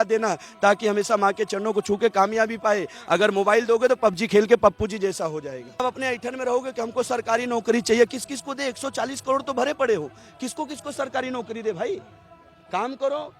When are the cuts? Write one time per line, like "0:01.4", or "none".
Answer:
0:05.8

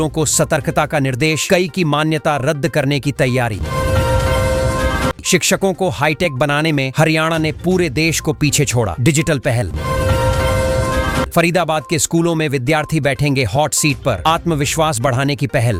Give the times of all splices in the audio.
none

